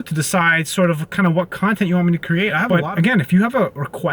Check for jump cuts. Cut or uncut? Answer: cut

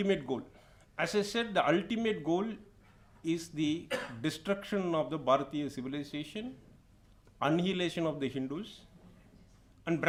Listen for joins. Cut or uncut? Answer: uncut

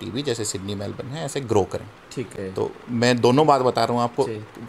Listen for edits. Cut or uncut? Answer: uncut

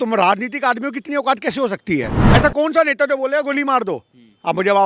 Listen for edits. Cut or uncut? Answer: cut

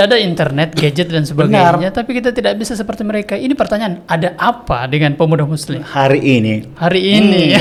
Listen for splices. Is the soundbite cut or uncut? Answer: uncut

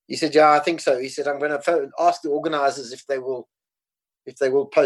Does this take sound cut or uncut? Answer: uncut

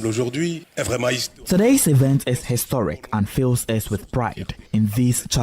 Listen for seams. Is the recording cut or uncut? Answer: cut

